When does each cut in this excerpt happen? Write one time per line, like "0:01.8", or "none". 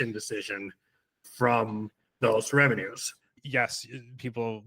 0:01.2
0:03.3

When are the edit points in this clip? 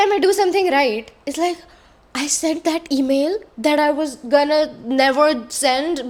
none

